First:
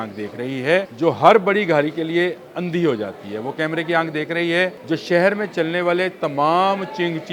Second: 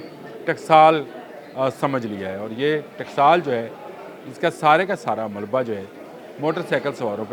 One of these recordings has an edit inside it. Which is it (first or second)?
first